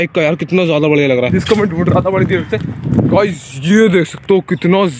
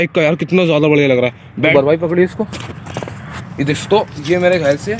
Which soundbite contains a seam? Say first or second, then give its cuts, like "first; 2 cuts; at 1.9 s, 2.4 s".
first; 1 cut; at 1.3 s